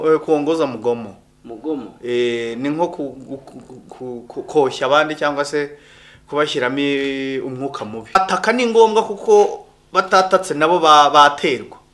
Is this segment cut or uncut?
cut